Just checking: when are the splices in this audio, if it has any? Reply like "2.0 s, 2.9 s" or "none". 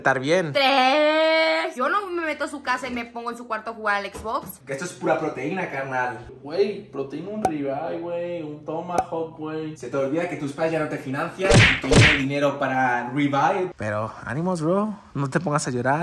4.5 s, 13.7 s